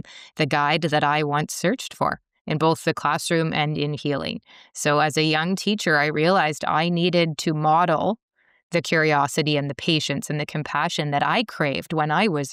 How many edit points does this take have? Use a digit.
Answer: 0